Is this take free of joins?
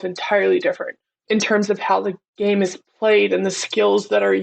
no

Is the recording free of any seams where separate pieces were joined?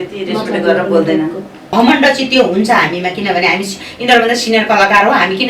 no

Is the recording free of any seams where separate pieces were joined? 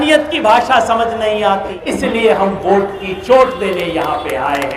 no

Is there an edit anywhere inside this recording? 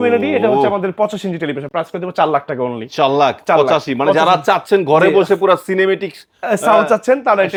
no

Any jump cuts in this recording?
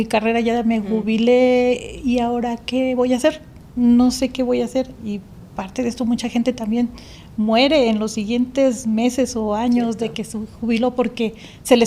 no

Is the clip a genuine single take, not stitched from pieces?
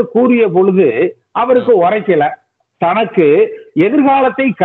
no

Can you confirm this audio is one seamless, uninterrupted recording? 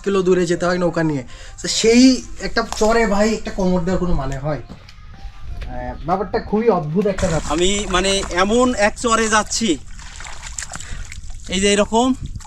no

